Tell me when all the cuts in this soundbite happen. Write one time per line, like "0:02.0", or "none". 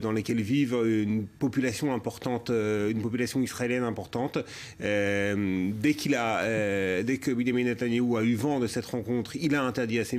none